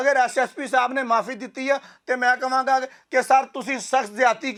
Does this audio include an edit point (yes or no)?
no